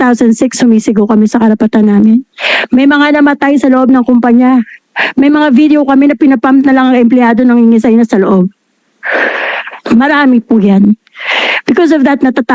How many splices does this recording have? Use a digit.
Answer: 0